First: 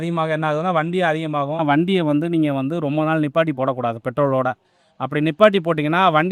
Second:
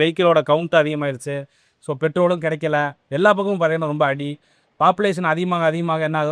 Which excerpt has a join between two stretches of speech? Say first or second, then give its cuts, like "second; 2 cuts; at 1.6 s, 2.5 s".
first; 1 cut; at 1.6 s